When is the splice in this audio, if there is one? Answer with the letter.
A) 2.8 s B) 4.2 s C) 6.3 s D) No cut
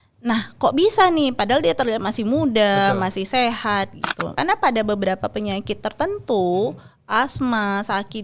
B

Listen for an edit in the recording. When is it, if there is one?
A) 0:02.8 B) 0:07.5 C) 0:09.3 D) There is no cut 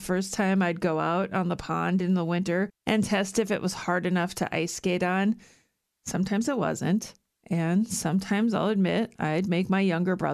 A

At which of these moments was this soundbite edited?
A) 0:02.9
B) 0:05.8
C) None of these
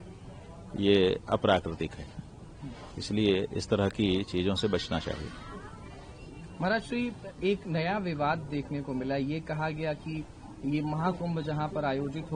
C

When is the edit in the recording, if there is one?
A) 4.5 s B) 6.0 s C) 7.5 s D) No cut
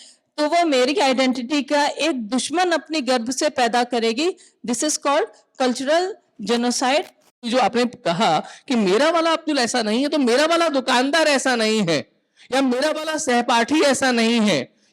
C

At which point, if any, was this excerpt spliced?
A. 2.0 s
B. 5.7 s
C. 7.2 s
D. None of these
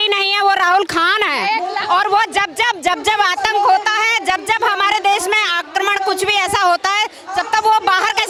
D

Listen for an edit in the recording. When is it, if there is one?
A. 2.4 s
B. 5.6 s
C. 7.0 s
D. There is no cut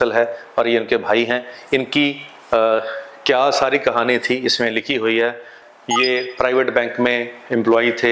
B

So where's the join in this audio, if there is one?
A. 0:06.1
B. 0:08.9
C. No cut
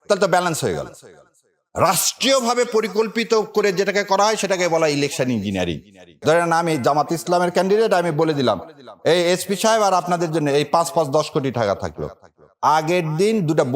A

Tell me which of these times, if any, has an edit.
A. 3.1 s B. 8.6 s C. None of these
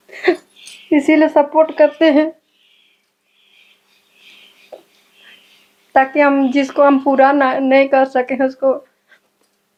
C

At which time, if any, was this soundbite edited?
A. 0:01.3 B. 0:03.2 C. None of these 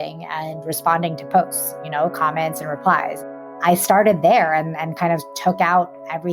B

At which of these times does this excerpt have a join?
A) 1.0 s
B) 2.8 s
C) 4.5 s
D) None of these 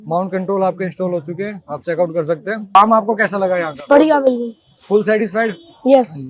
B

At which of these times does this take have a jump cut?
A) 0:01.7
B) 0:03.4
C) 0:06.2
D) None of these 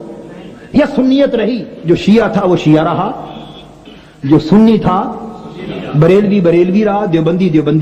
A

